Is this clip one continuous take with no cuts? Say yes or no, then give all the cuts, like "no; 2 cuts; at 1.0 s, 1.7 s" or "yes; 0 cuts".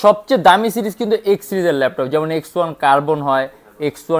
yes; 0 cuts